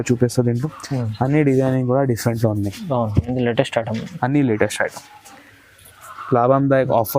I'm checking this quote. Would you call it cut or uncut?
uncut